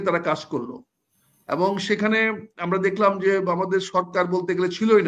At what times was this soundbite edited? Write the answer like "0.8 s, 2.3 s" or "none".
none

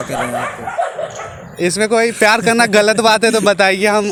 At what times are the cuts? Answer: none

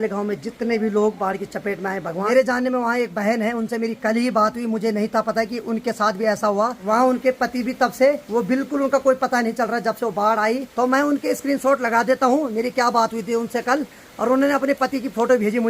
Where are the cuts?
2.2 s, 6.8 s, 8.2 s, 10.7 s

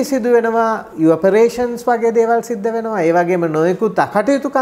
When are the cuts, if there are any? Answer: none

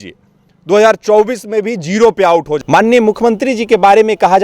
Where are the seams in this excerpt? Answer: 2.5 s

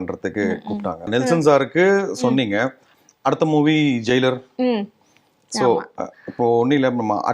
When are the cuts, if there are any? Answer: 1.1 s

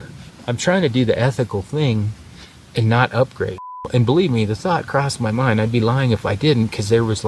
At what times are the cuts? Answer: 3.8 s

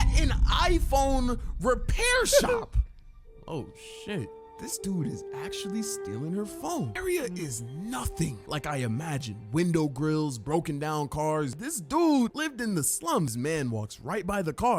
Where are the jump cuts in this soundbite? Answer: 4.5 s, 6.9 s, 13.3 s

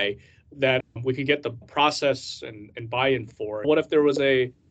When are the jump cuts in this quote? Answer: 1.6 s, 3.7 s

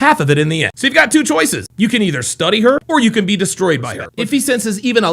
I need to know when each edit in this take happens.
4.0 s

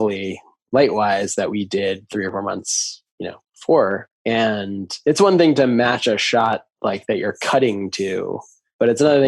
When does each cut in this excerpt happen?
4.9 s

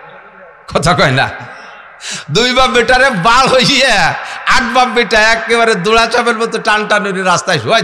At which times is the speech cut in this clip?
none

